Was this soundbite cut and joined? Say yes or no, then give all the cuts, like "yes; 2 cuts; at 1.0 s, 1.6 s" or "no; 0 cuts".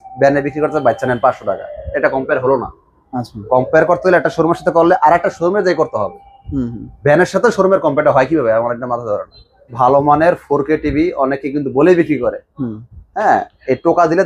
yes; 1 cut; at 9.7 s